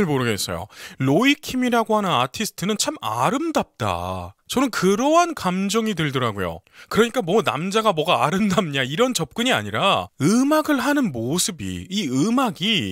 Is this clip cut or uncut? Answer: uncut